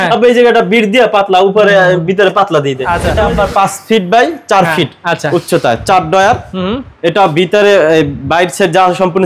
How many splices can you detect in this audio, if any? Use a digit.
1